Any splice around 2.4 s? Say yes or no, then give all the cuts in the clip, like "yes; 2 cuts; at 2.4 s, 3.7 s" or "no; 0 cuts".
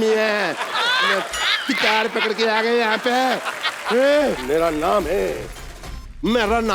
no; 1 cut; at 4.4 s